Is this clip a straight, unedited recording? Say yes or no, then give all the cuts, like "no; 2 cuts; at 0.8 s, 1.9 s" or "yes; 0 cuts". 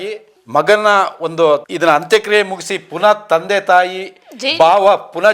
no; 1 cut; at 1.7 s